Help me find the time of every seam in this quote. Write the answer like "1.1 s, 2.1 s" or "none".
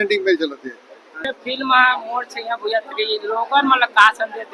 1.3 s